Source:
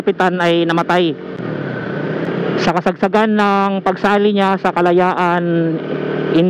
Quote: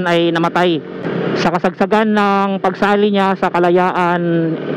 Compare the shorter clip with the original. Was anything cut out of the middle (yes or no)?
yes